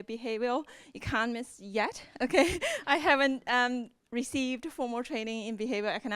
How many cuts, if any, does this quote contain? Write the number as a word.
one